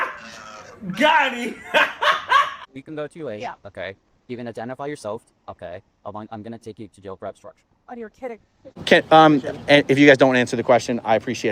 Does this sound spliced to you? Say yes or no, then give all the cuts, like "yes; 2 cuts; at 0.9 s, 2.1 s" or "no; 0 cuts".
yes; 2 cuts; at 2.6 s, 8.6 s